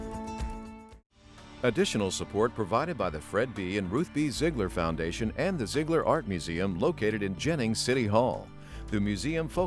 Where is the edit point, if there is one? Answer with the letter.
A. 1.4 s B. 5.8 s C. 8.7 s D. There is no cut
A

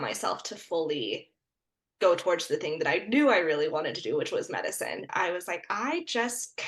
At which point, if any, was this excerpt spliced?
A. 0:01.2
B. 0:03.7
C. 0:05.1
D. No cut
C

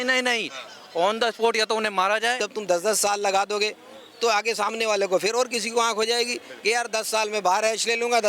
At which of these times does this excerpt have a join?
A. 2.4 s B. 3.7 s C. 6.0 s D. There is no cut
A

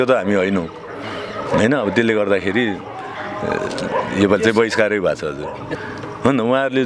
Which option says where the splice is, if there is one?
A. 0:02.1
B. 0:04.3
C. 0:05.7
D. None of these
C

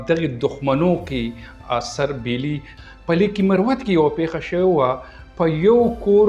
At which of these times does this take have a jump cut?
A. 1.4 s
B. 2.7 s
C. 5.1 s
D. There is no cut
B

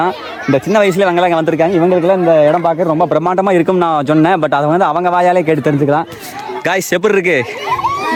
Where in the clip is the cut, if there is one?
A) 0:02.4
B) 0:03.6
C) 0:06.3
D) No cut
D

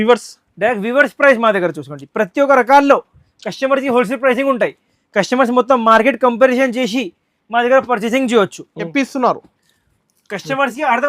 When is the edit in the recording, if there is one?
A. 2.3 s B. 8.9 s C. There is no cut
B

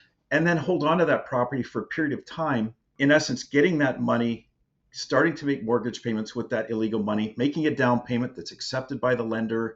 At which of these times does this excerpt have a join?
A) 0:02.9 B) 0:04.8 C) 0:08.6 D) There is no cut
A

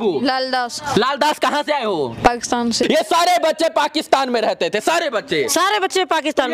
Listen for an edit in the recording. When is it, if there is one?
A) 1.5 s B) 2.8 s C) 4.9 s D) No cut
B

